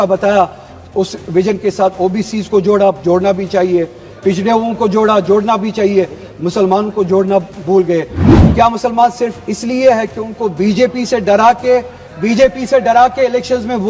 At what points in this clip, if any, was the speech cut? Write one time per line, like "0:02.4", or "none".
0:08.2